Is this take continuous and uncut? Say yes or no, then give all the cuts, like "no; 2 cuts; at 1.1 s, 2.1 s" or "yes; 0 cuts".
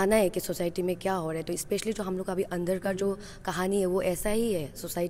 yes; 0 cuts